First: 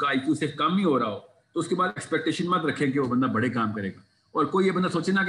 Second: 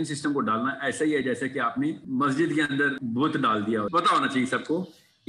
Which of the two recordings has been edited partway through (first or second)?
second